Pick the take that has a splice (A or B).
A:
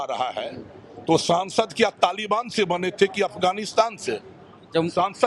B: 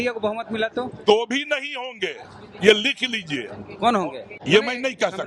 B